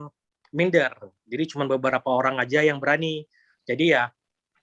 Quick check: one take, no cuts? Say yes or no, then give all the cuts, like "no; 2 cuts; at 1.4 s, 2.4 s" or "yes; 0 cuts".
yes; 0 cuts